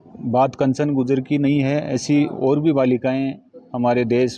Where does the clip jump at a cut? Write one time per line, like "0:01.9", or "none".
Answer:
none